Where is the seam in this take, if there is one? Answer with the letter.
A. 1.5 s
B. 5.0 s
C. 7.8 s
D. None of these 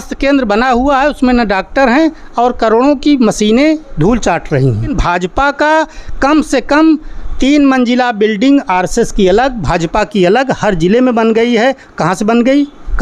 B